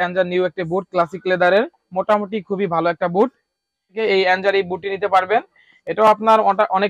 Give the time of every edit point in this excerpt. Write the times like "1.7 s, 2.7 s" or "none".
4.0 s